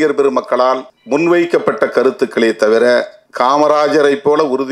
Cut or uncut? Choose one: cut